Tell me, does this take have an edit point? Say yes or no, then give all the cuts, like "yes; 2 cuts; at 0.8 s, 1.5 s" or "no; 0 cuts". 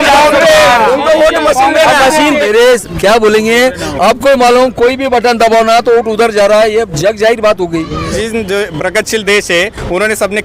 yes; 2 cuts; at 2.4 s, 8.2 s